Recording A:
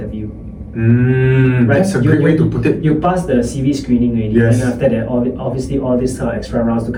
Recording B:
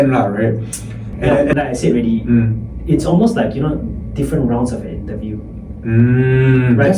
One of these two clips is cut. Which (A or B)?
B